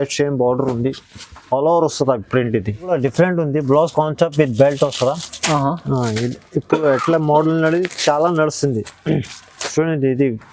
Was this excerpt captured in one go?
no; 1 cut; at 2.9 s

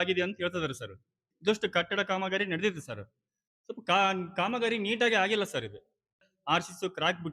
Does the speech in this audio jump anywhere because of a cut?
yes; 2 cuts; at 1.3 s, 6.3 s

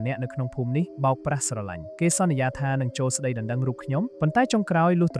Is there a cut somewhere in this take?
yes; 3 cuts; at 0.9 s, 1.8 s, 4.1 s

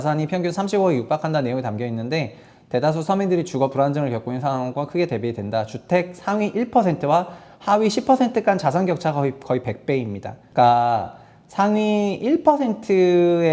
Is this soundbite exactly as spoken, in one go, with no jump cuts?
yes; 0 cuts

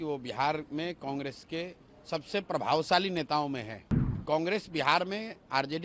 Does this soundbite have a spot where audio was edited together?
yes; 1 cut; at 4.2 s

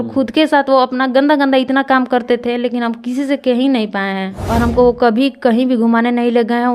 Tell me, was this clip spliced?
yes; 1 cut; at 4.3 s

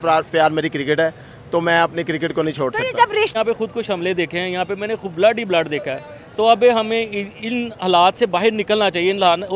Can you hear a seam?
yes; 1 cut; at 3.3 s

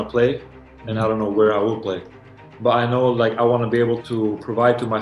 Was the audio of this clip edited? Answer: yes; 1 cut; at 4.0 s

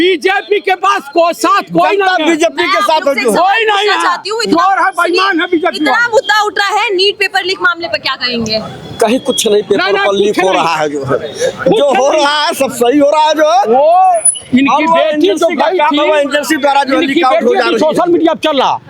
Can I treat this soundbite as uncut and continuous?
yes; 0 cuts

